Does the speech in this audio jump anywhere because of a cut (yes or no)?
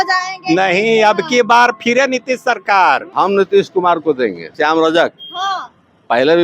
yes